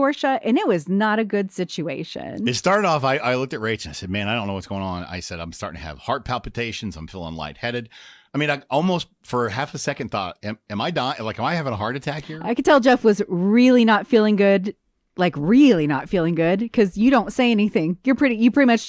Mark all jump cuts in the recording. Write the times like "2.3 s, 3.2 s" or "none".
none